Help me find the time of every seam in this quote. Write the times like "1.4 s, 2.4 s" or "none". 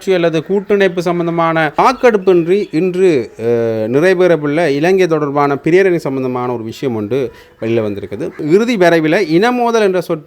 1.8 s, 8.4 s